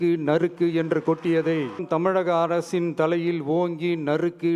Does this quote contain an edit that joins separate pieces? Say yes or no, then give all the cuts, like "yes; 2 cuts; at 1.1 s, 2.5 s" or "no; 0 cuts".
yes; 1 cut; at 1.8 s